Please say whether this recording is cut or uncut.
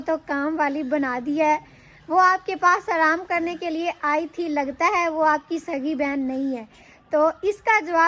uncut